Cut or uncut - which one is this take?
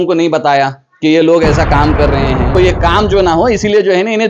cut